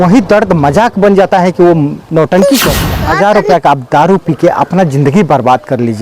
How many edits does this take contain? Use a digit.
1